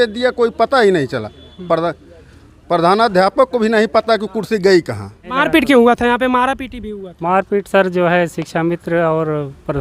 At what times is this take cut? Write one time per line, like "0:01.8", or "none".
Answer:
0:05.4

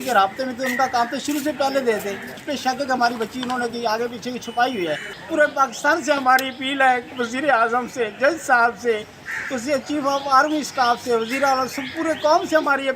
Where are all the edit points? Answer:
0:02.5
0:05.1

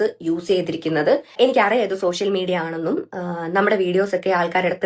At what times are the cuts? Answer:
0:02.1

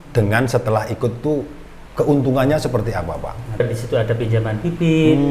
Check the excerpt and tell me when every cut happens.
0:03.6

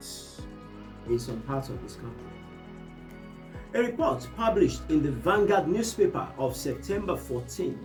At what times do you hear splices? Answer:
none

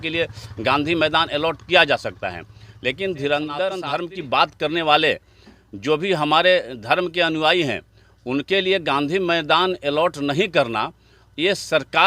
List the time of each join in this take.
0:03.8

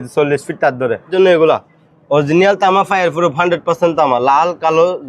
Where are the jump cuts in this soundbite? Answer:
0:01.1

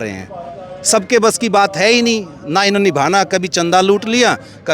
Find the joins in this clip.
none

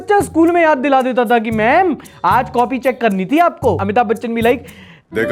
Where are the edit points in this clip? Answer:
0:03.8

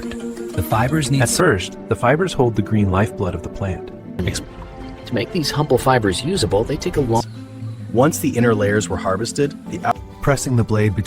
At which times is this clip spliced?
0:01.3
0:04.3
0:07.2
0:09.9

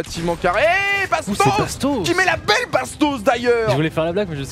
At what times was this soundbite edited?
none

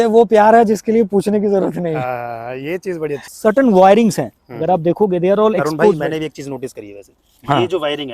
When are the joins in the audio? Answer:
0:03.3

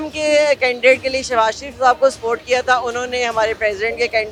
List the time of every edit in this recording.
none

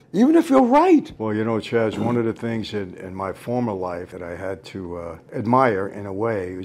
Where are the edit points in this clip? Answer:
0:01.1
0:04.1
0:05.2

